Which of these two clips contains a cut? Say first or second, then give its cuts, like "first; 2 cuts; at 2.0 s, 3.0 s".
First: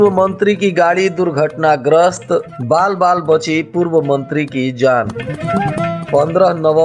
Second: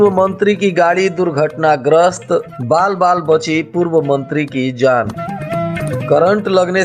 second; 1 cut; at 5.3 s